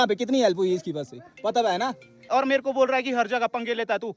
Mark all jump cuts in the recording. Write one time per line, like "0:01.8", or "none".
0:02.2